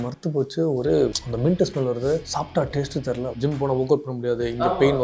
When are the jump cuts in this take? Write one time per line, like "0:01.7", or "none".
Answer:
0:01.2
0:02.3
0:03.4